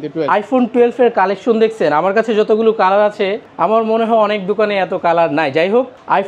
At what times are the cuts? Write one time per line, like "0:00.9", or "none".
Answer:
none